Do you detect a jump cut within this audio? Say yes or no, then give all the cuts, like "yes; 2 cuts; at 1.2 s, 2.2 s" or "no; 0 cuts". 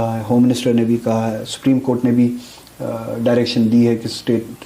no; 0 cuts